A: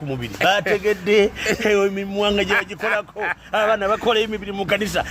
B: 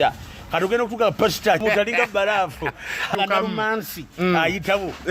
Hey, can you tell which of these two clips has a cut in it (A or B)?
B